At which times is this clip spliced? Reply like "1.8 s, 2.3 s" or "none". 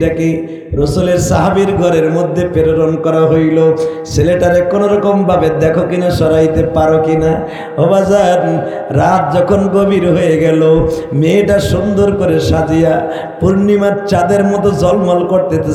none